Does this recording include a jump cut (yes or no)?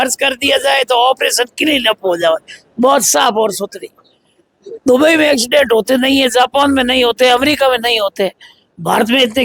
no